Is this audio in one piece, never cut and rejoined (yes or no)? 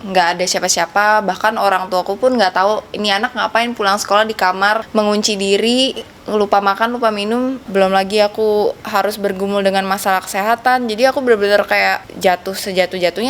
no